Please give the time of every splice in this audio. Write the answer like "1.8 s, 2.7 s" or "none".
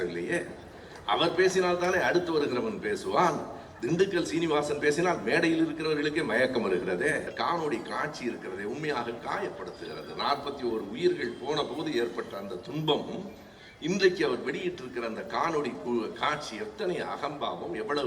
7.3 s